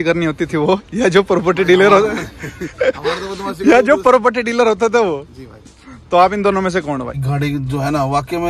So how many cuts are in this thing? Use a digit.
1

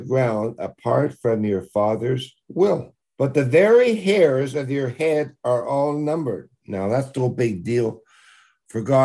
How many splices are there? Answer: 1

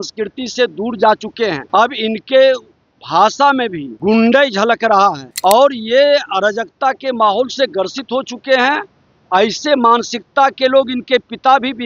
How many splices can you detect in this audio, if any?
3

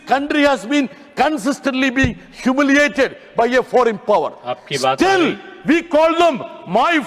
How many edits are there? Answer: 0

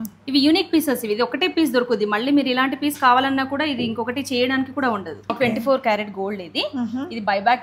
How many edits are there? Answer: 1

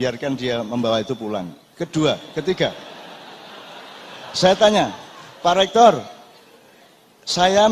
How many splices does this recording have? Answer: 0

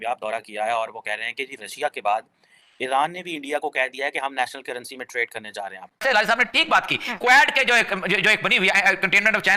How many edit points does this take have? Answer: 1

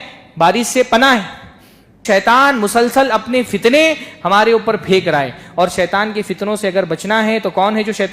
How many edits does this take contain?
1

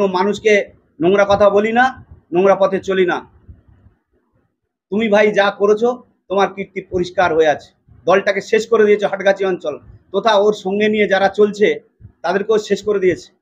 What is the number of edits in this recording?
0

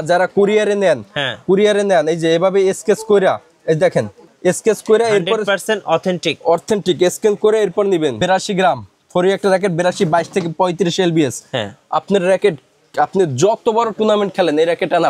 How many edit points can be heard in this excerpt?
1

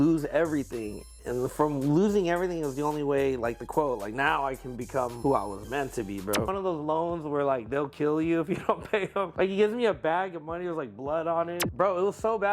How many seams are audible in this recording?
4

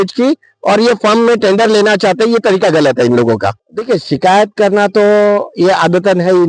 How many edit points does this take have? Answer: 1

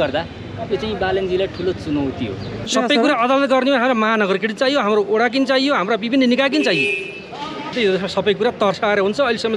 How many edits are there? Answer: 2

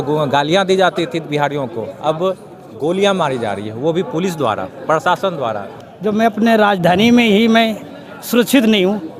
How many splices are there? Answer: 1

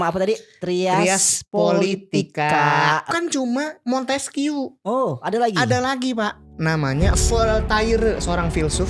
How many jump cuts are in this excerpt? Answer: 1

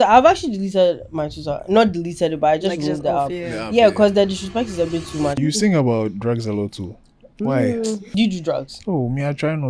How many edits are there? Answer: 2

